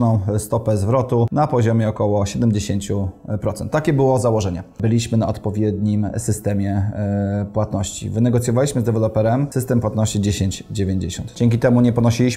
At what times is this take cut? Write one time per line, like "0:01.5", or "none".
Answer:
0:01.3
0:04.8
0:09.5
0:11.2